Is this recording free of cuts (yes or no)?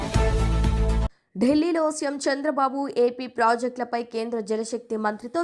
no